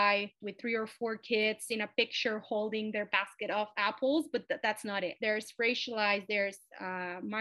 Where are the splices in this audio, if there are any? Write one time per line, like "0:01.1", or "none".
0:05.2